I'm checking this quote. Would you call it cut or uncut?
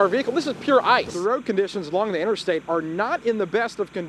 cut